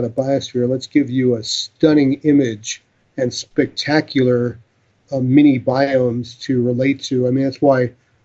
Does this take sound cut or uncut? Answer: cut